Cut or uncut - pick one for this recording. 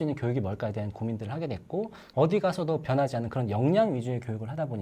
cut